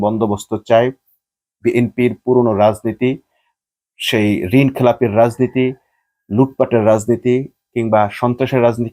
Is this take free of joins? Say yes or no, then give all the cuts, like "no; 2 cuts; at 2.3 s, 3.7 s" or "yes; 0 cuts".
yes; 0 cuts